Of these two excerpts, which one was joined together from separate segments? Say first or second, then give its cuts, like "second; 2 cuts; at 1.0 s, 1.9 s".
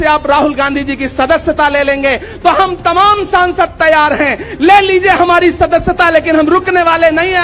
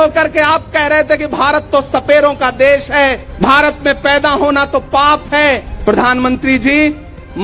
second; 2 cuts; at 3.3 s, 5.7 s